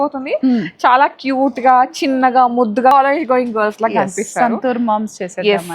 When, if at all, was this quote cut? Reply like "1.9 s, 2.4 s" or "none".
2.9 s